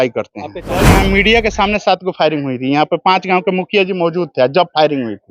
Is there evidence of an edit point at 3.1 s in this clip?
no; 1 cut; at 1.0 s

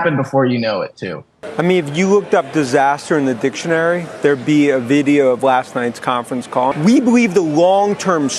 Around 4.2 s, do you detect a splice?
no; 2 cuts; at 1.3 s, 6.7 s

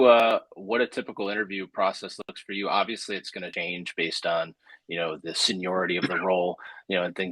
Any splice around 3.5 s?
yes; 1 cut; at 3.5 s

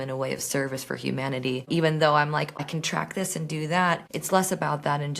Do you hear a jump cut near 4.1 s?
yes; 3 cuts; at 1.7 s, 2.6 s, 4.1 s

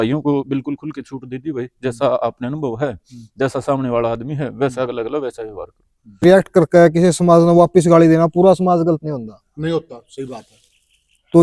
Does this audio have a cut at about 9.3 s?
no; 1 cut; at 6.2 s

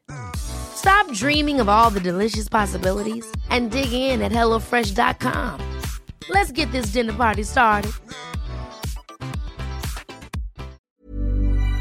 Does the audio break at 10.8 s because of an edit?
yes; 1 cut; at 10.8 s

